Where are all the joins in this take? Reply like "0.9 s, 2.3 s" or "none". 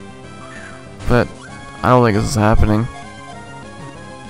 2.9 s

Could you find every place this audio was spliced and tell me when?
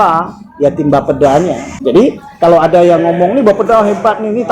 1.7 s

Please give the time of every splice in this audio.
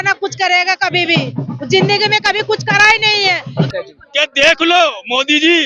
3.7 s

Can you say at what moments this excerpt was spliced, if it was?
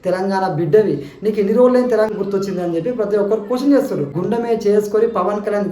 2.1 s, 4.2 s

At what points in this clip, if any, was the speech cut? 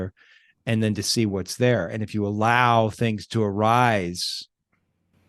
none

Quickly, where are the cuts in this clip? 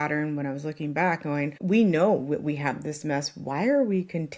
1.6 s

